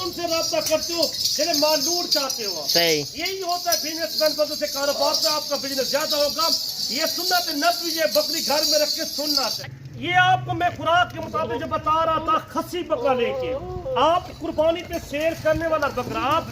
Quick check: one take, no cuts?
no; 1 cut; at 9.6 s

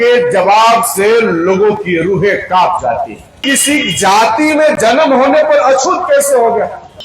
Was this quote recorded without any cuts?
no; 1 cut; at 3.4 s

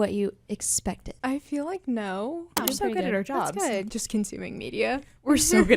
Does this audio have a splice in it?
yes; 3 cuts; at 1.1 s, 2.5 s, 3.9 s

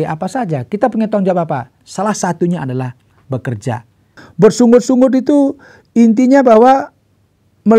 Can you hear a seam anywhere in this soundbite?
yes; 1 cut; at 4.1 s

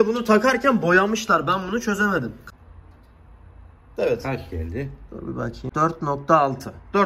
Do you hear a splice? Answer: yes; 2 cuts; at 2.4 s, 5.7 s

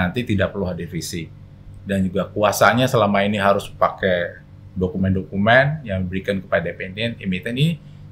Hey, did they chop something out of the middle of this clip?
no; 0 cuts

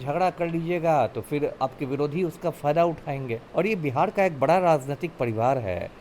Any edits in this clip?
yes; 1 cut; at 3.4 s

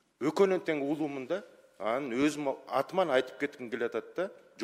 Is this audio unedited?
yes; 0 cuts

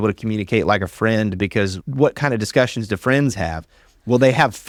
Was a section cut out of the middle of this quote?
no; 0 cuts

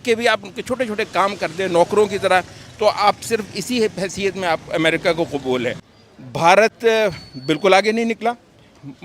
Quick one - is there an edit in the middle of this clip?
yes; 1 cut; at 5.9 s

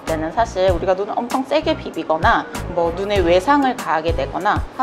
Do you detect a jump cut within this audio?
yes; 1 cut; at 2.6 s

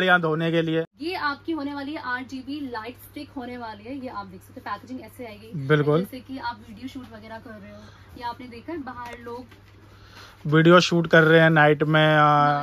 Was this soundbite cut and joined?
yes; 1 cut; at 0.9 s

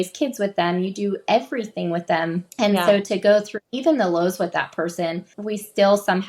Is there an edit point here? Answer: yes; 3 cuts; at 2.5 s, 3.6 s, 5.4 s

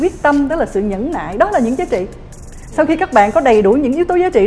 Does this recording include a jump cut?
no; 0 cuts

